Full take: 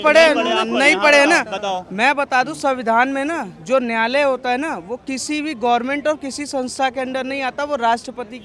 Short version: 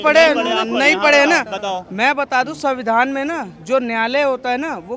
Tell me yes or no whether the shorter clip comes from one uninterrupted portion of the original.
yes